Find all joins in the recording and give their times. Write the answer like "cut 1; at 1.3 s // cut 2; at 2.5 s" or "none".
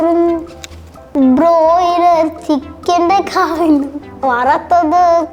cut 1; at 4.0 s